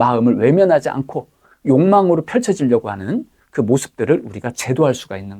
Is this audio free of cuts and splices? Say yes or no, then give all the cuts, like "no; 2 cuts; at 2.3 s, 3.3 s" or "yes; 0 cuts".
yes; 0 cuts